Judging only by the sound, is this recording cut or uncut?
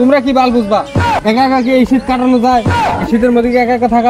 cut